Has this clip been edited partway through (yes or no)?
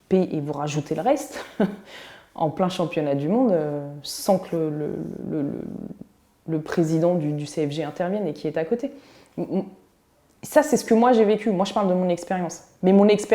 no